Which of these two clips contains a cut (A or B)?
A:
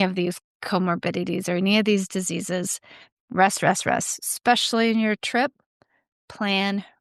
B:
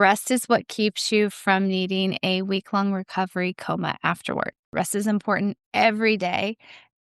B